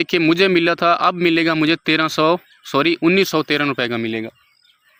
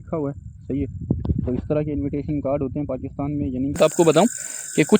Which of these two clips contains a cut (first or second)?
second